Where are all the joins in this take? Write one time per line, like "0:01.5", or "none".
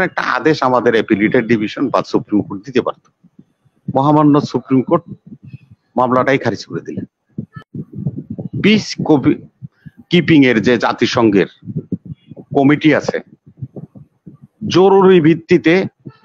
0:07.5